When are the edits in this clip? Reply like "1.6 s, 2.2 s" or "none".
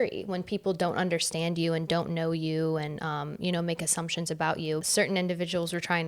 4.8 s

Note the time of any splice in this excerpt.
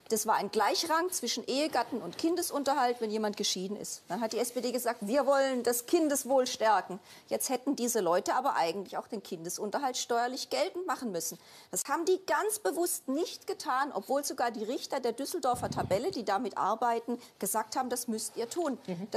5.0 s

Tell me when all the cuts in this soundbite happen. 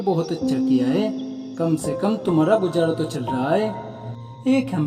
none

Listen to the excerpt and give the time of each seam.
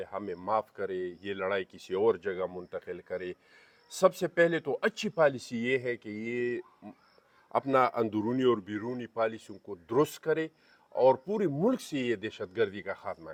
none

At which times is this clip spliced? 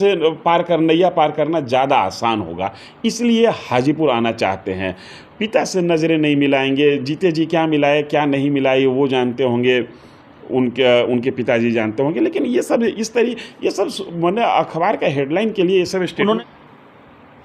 16.4 s

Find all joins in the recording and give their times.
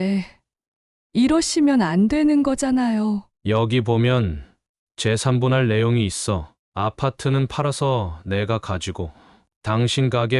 3.3 s

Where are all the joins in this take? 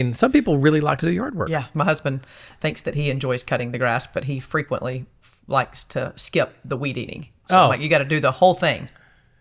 1.7 s

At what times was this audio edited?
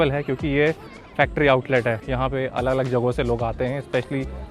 2.1 s

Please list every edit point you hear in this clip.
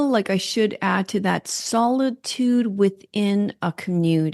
none

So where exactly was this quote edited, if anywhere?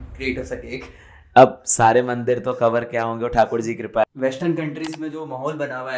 4.0 s

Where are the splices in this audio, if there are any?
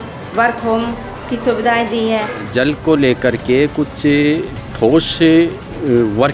2.5 s

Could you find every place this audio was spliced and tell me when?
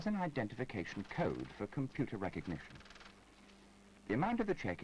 none

